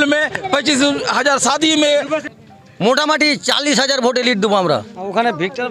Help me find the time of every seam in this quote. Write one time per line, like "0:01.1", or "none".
0:02.2